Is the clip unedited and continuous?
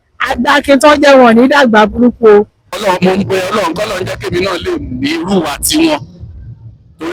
no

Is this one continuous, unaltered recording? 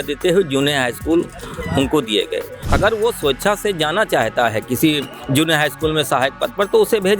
no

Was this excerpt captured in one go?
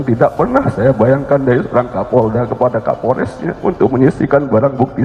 yes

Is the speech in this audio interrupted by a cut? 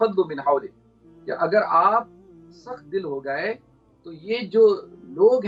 no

